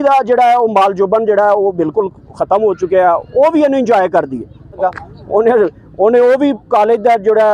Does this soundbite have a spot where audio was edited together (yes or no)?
yes